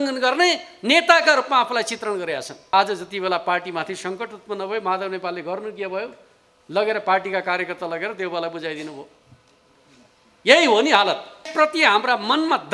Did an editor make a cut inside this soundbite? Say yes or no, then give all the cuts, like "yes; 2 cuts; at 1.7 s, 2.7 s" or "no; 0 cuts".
yes; 2 cuts; at 2.7 s, 11.5 s